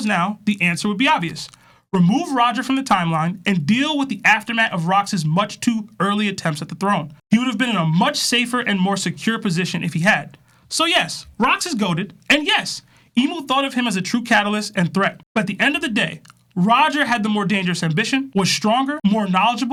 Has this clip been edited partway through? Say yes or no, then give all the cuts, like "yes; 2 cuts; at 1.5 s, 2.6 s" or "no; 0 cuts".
no; 0 cuts